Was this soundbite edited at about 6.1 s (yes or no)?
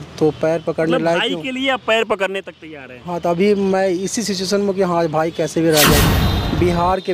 yes